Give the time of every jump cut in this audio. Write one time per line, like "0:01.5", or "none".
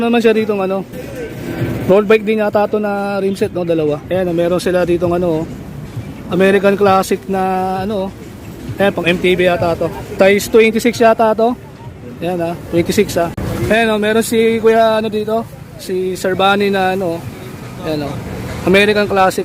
0:01.0
0:04.0
0:10.0
0:13.4